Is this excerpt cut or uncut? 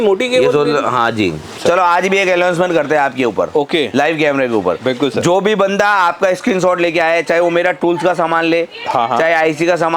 cut